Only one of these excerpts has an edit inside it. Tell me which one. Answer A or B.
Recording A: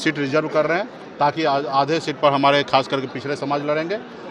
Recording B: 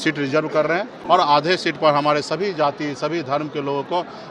B